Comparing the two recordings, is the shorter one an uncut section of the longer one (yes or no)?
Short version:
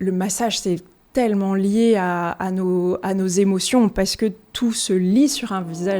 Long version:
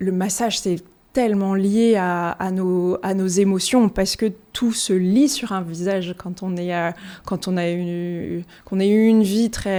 yes